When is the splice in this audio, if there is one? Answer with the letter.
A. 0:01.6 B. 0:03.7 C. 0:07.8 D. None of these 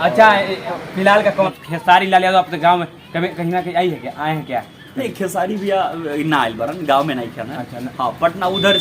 A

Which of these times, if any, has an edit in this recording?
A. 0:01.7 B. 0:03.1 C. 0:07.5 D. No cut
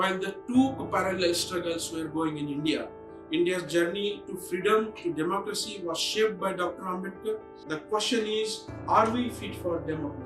C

